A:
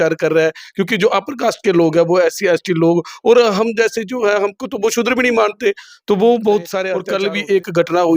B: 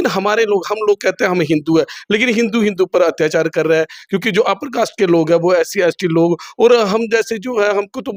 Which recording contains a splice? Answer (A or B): A